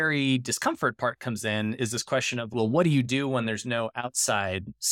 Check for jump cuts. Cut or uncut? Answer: cut